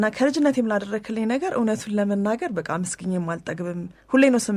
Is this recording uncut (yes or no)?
yes